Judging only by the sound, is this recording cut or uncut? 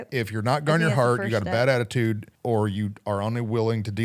cut